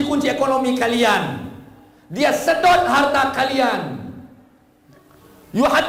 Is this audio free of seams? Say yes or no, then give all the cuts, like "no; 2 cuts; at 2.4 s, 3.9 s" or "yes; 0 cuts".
yes; 0 cuts